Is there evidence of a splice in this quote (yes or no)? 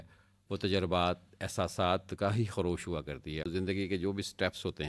yes